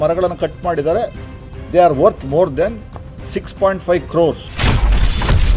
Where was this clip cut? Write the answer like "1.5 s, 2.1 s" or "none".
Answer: 4.4 s